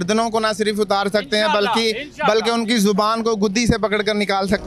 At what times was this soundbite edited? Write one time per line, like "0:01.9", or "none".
none